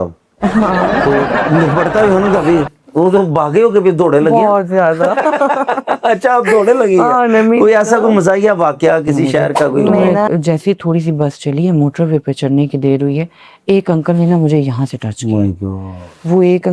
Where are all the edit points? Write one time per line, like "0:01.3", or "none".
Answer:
0:10.3

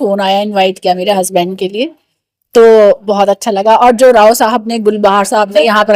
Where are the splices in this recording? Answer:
none

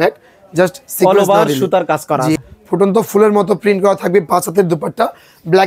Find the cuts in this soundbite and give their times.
0:02.4

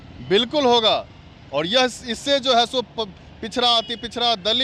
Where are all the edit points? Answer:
none

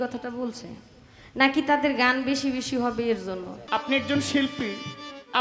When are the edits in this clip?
0:03.5

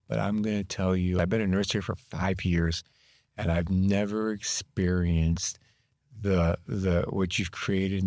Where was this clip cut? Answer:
0:01.2

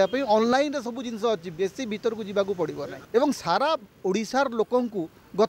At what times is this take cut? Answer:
0:02.9

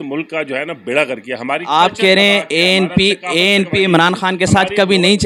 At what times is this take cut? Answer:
none

